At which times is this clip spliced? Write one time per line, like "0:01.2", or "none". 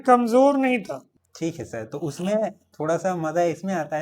0:01.1